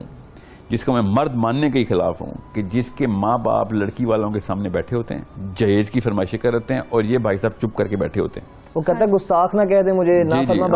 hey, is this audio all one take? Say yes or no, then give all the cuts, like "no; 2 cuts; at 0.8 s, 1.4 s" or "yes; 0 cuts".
yes; 0 cuts